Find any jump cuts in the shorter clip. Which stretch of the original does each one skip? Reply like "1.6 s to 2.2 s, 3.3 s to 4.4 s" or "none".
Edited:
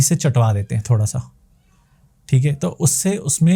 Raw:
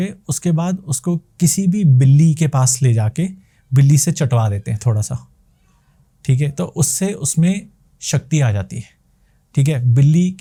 none